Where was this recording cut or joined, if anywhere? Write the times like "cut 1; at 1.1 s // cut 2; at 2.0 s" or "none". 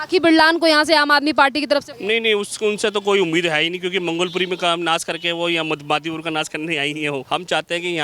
cut 1; at 1.9 s // cut 2; at 7.2 s